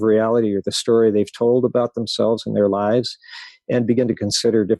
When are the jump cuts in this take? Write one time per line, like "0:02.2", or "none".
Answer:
none

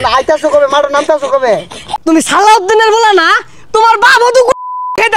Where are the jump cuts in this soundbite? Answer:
0:01.8

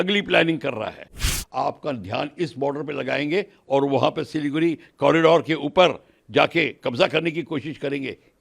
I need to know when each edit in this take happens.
0:01.3

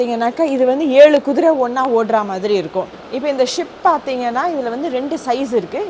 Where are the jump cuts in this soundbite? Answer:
0:03.0

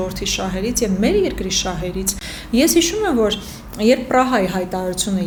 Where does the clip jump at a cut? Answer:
none

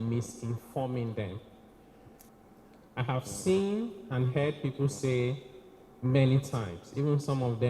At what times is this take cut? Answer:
0:02.3

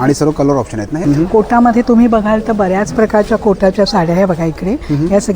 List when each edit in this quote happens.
0:01.0

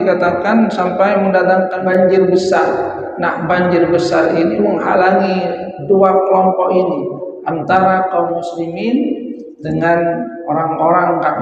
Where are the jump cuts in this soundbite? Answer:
0:01.8

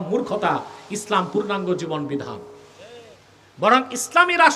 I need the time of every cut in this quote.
none

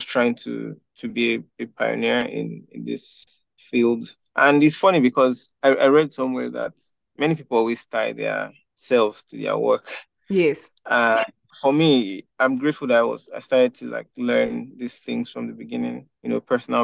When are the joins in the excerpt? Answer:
none

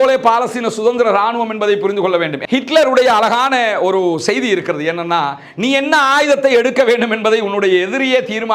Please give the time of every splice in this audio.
0:02.4

